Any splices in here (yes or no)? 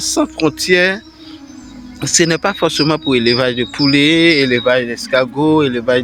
no